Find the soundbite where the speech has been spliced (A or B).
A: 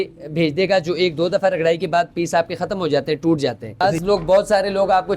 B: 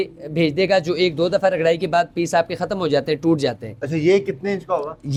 A